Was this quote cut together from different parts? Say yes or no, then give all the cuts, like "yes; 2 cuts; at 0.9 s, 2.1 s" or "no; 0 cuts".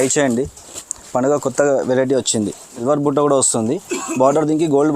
yes; 1 cut; at 2.8 s